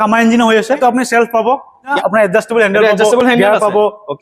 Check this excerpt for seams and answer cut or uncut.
cut